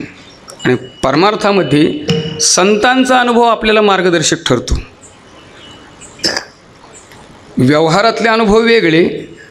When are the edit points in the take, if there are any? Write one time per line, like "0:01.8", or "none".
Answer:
none